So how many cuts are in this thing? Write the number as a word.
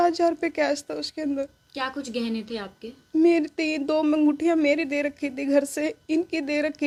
zero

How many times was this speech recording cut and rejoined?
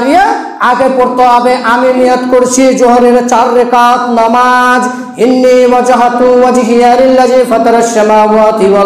zero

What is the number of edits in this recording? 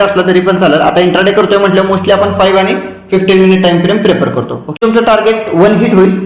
one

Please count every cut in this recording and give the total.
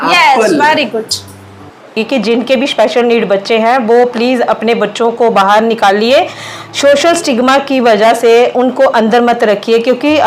one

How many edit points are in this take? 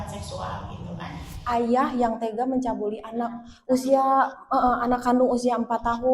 one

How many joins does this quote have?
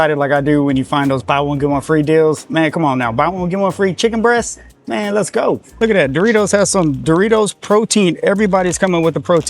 one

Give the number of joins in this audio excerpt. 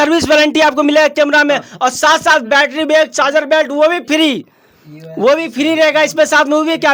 zero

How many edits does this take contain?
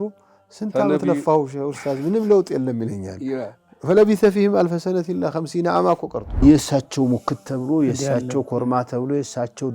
one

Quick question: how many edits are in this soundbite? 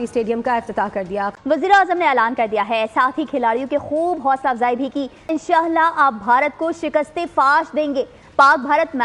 two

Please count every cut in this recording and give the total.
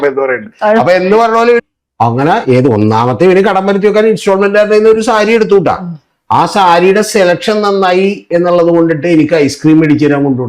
one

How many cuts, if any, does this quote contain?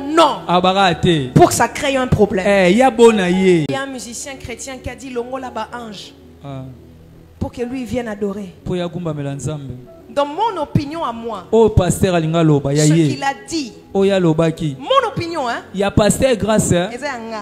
two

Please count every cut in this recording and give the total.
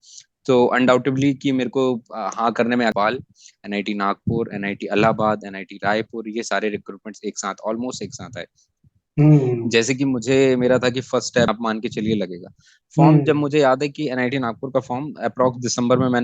two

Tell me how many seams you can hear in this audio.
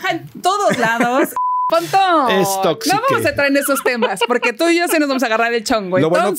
one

